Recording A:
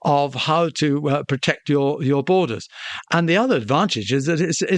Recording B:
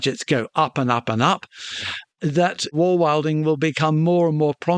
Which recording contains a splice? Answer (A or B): B